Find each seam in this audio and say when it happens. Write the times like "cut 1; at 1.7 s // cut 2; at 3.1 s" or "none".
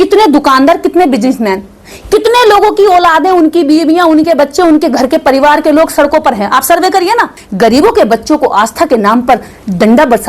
cut 1; at 7.4 s